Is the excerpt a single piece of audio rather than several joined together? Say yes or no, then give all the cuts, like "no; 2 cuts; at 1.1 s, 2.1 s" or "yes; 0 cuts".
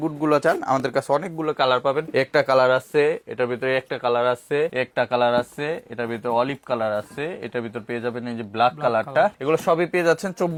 yes; 0 cuts